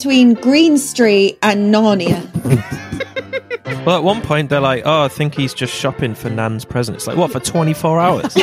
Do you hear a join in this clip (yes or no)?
yes